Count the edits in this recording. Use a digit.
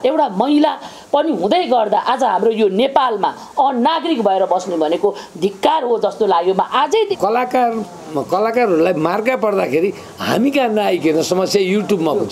1